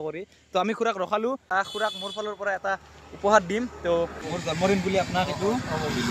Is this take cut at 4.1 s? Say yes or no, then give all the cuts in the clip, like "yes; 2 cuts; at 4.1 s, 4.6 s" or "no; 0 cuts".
yes; 2 cuts; at 1.5 s, 4.1 s